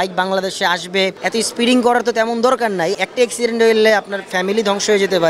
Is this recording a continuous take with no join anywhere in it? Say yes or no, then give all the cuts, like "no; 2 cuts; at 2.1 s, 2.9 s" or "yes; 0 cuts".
no; 2 cuts; at 1.2 s, 2.9 s